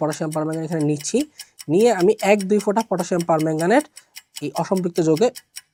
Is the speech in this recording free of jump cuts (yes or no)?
yes